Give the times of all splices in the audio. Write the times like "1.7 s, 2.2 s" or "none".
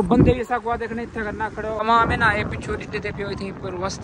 1.8 s